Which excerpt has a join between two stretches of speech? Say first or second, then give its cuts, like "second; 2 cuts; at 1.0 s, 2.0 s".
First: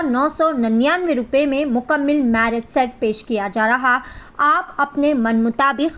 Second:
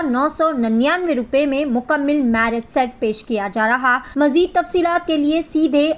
second; 1 cut; at 4.0 s